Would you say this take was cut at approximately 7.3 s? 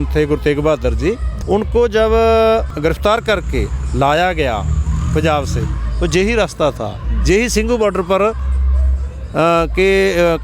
no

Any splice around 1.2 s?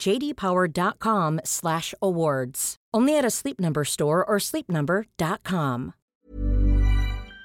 no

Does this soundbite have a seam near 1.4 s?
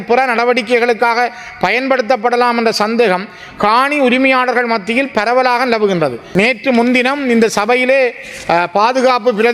no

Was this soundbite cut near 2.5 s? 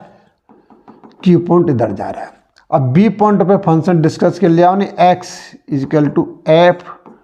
no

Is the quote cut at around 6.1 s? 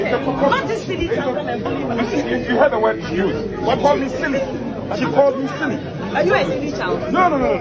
no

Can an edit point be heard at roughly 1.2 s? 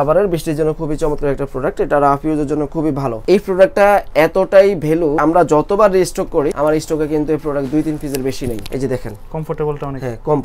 no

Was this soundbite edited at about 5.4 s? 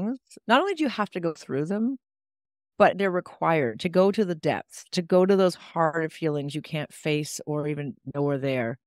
no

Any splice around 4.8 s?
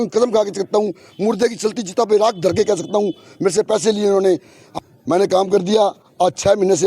yes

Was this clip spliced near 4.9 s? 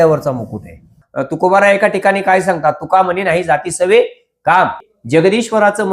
yes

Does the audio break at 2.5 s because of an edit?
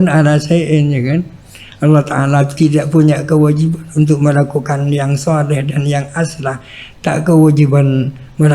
yes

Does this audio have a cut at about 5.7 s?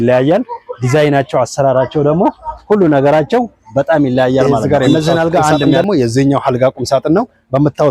yes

